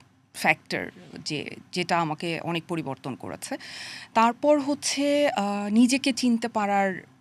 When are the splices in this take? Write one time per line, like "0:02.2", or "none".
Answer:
none